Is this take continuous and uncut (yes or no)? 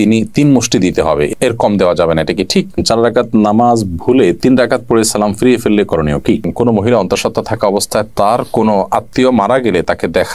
no